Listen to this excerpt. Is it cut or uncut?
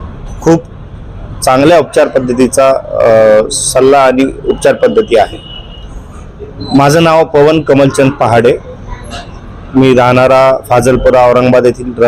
uncut